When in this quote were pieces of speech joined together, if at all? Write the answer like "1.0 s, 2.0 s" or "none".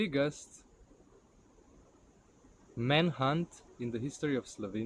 3.7 s